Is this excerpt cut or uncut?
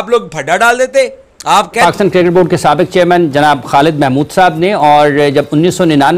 uncut